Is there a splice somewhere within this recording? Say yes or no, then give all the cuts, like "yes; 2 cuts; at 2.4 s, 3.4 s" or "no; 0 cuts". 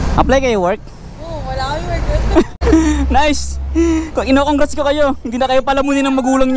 yes; 1 cut; at 2.6 s